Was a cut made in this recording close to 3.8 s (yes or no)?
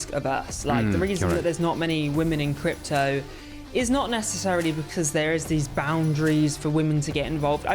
no